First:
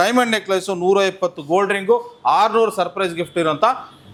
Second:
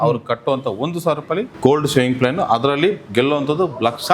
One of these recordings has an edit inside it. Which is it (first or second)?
second